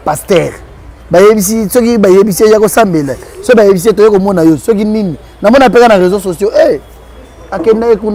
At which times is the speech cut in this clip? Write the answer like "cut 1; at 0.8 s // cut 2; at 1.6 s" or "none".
none